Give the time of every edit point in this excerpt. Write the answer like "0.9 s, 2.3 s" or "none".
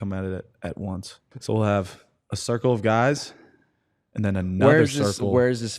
1.3 s